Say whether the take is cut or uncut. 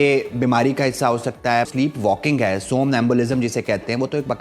cut